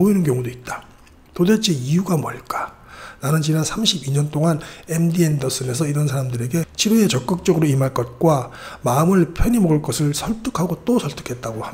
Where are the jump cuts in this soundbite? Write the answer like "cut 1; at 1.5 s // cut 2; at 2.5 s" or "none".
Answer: none

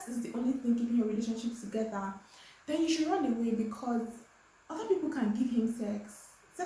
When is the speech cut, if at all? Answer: none

